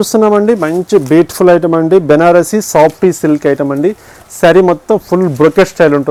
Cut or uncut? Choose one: uncut